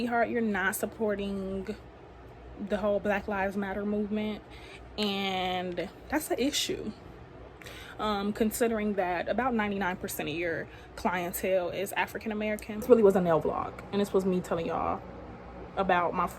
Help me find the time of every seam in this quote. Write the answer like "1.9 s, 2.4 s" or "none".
12.8 s

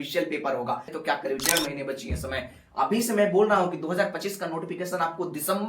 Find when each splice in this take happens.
0.9 s

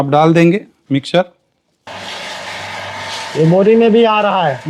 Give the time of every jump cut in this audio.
1.9 s

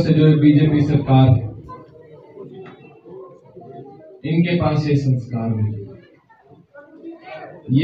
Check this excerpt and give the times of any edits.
none

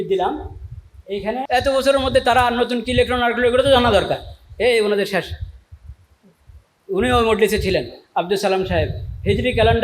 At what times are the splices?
1.5 s

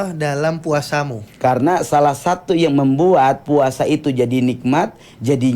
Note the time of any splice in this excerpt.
1.2 s

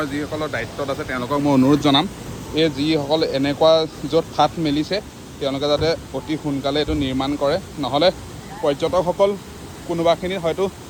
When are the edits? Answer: none

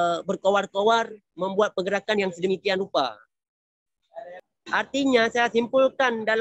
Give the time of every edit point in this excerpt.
4.5 s

